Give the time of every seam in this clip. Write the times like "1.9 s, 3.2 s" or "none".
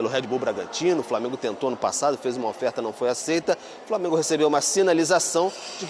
none